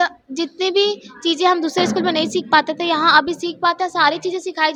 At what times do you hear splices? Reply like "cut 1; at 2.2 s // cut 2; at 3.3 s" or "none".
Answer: none